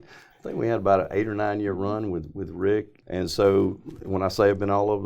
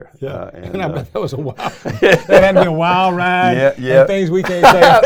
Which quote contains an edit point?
first; 1 cut; at 3.0 s

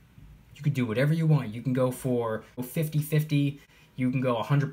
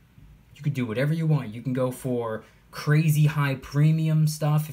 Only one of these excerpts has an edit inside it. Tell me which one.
first; 2 cuts; at 2.6 s, 3.7 s

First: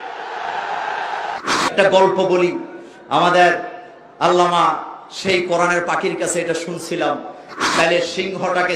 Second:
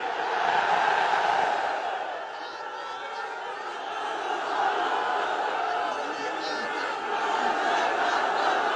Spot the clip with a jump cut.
first; 2 cuts; at 1.4 s, 7.6 s

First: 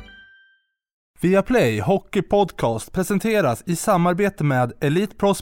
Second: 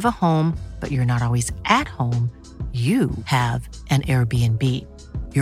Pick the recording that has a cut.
first; 1 cut; at 1.0 s

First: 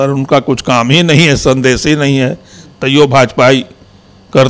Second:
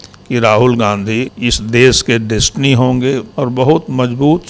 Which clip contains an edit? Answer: second; 2 cuts; at 1.3 s, 3.3 s

